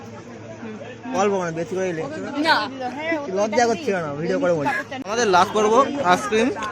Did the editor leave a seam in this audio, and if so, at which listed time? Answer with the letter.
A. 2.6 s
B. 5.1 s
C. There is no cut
B